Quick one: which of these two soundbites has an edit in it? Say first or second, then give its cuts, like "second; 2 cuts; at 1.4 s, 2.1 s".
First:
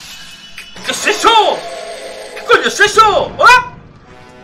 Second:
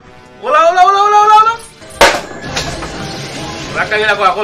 second; 1 cut; at 1.8 s